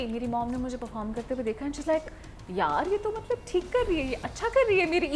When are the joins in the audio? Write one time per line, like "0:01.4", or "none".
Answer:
none